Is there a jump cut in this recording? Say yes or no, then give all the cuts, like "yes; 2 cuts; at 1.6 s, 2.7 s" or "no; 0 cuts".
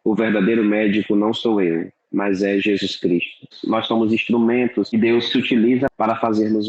yes; 3 cuts; at 3.6 s, 4.9 s, 5.9 s